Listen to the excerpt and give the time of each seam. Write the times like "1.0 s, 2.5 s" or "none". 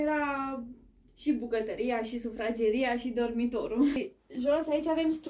4.0 s